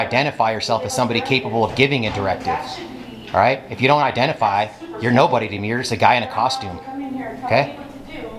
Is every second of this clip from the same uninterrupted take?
yes; 0 cuts

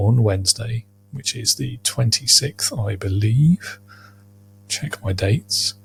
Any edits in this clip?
no; 0 cuts

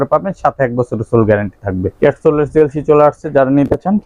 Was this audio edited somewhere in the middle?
yes; 1 cut; at 1.9 s

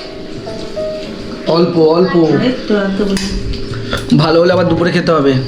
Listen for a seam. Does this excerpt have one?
no; 0 cuts

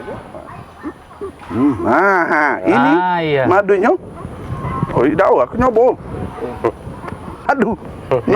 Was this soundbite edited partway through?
yes; 1 cut; at 7.5 s

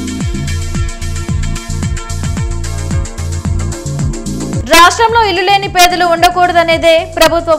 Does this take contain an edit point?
yes; 1 cut; at 2.5 s

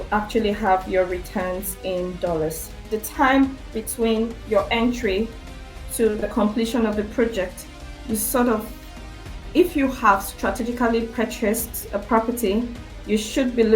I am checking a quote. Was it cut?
yes; 1 cut; at 2.8 s

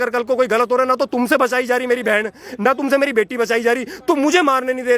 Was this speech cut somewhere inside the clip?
no; 0 cuts

